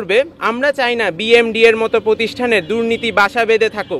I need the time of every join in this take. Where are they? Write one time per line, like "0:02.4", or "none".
none